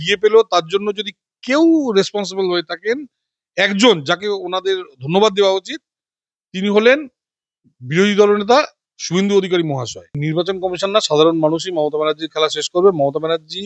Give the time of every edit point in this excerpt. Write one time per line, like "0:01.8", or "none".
0:10.2